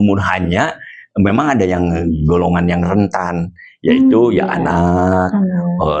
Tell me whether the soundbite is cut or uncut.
uncut